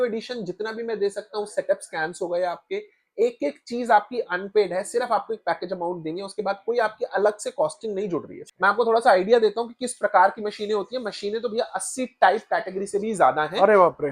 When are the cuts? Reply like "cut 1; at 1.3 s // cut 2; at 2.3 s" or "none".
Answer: cut 1; at 8.5 s